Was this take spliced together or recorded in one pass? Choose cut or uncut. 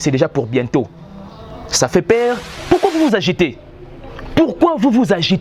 cut